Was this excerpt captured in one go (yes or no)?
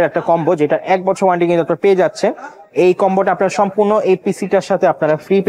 yes